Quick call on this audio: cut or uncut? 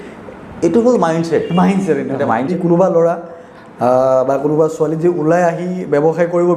cut